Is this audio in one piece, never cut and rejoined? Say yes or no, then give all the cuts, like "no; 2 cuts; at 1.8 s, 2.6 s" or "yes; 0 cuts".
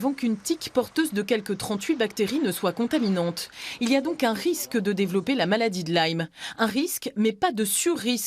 yes; 0 cuts